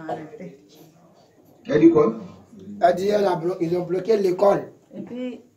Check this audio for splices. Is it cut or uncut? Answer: uncut